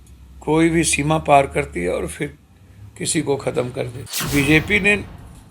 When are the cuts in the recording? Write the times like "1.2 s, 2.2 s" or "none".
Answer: 4.0 s